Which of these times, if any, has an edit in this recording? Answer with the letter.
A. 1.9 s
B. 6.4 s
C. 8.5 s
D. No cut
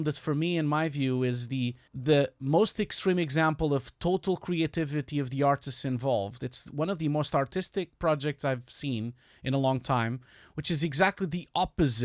A